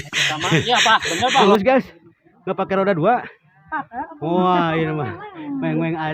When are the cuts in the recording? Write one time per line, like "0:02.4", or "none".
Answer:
0:01.4